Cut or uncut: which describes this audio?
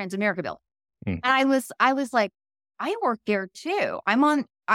uncut